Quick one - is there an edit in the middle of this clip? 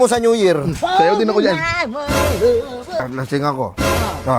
yes; 1 cut; at 3.0 s

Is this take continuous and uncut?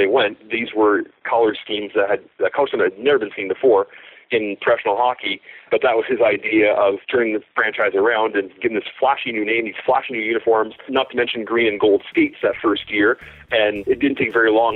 no; 4 cuts; at 5.6 s, 7.0 s, 10.9 s, 13.8 s

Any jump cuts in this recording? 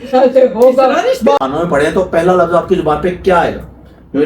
yes; 1 cut; at 1.4 s

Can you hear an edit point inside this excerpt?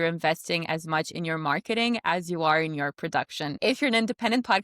yes; 1 cut; at 3.5 s

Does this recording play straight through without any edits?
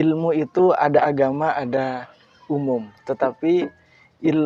yes; 0 cuts

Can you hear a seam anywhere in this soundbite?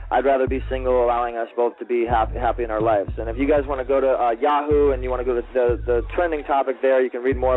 no; 0 cuts

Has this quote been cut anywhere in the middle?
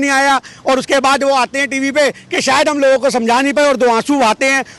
no; 0 cuts

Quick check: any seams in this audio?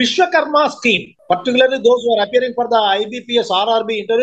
yes; 1 cut; at 1.1 s

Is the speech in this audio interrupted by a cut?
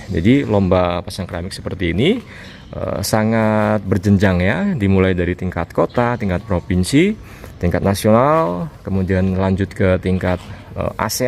no; 0 cuts

